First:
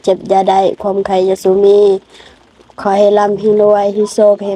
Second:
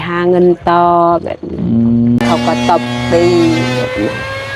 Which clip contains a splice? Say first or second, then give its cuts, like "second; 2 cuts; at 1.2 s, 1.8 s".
second; 1 cut; at 2.2 s